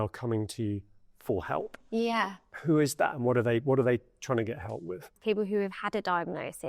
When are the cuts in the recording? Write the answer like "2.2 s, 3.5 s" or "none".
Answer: 5.1 s

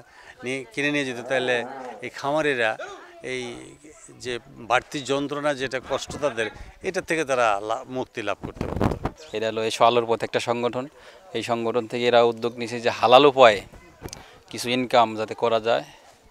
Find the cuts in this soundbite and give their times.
9.2 s

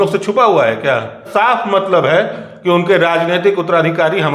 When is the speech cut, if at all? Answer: 1.3 s

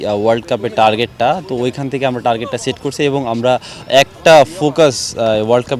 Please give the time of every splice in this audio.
none

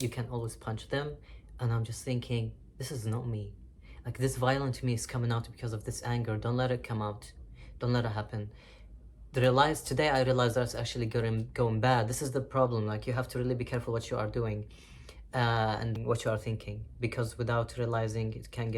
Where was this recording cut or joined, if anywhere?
16.0 s

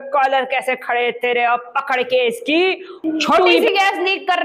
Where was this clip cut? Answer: 2.9 s

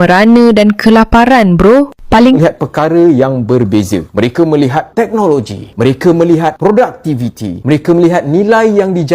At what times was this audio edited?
2.4 s

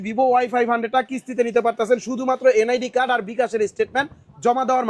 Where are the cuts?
none

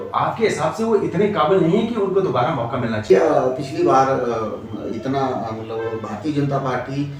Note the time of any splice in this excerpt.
3.0 s

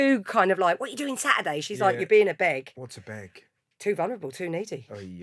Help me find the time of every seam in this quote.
2.8 s

